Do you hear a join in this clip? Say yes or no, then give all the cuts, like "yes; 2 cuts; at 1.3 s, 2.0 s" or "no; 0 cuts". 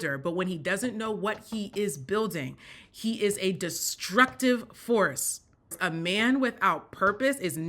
yes; 1 cut; at 5.8 s